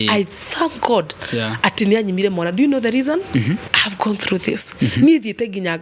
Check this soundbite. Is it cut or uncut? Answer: cut